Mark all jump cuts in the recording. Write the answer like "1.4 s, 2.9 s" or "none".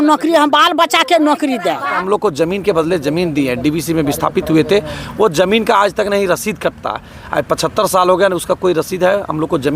2.0 s